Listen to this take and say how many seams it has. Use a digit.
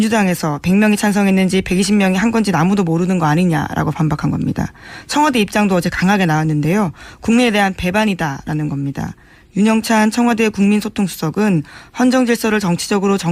1